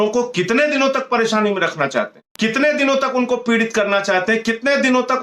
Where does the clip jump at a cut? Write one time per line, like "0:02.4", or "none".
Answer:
0:02.2